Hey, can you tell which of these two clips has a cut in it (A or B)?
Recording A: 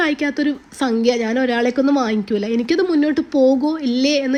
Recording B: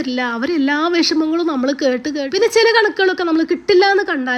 B